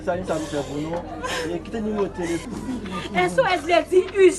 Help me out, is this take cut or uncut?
cut